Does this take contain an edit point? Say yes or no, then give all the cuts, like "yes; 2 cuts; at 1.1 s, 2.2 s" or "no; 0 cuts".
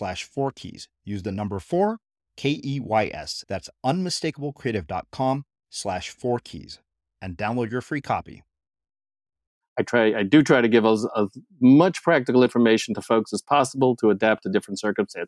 yes; 1 cut; at 9.6 s